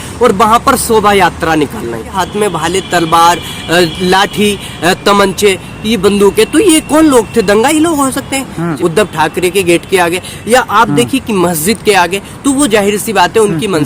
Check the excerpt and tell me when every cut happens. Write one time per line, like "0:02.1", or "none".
0:02.2
0:08.7

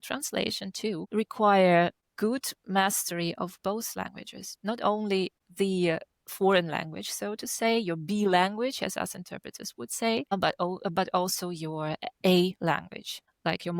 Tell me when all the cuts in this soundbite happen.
none

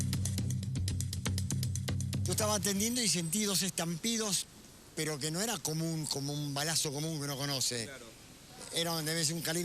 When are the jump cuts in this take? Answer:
0:02.0

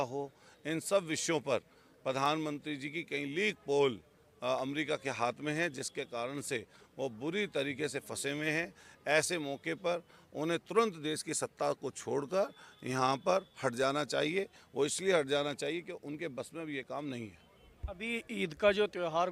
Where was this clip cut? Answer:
none

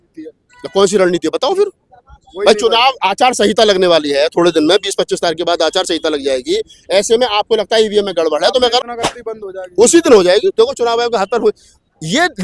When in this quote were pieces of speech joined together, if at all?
0:08.8

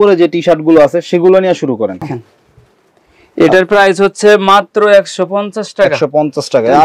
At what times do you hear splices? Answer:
0:02.2

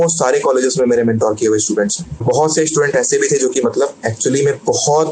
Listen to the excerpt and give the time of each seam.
0:02.2

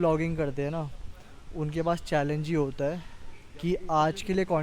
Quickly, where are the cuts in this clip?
none

